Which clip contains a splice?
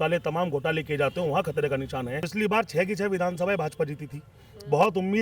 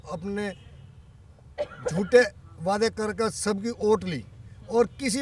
first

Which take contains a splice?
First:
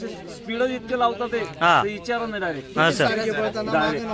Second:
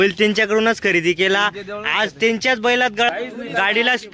second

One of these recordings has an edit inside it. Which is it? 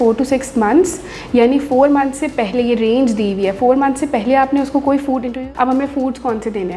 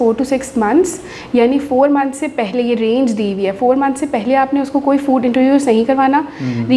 first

